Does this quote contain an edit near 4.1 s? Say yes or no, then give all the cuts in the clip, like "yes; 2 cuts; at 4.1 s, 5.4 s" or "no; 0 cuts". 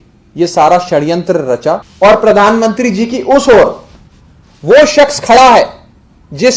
no; 1 cut; at 1.9 s